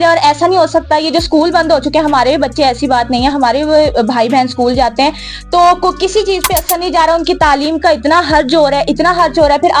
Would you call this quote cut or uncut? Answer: uncut